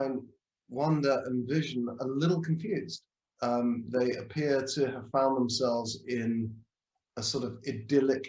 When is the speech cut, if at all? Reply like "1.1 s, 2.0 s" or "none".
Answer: none